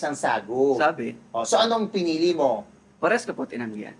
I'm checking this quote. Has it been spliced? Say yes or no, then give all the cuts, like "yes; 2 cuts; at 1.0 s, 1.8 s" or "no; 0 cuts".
no; 0 cuts